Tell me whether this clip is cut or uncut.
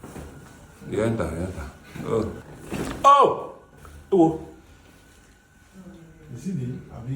cut